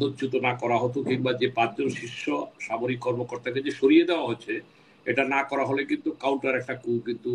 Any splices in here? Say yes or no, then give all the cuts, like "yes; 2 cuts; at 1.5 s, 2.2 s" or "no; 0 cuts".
no; 0 cuts